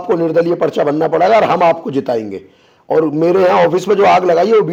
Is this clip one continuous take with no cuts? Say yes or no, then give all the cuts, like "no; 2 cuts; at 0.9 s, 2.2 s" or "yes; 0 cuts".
yes; 0 cuts